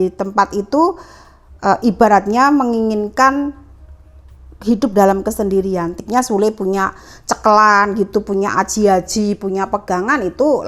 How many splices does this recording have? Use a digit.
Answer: 1